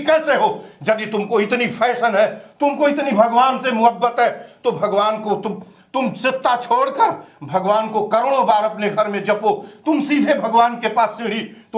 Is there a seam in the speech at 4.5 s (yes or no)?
no